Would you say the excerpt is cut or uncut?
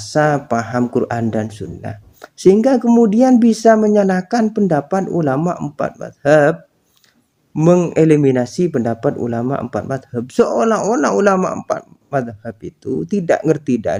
uncut